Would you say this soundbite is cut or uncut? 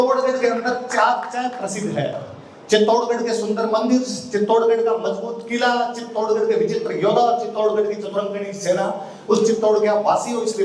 uncut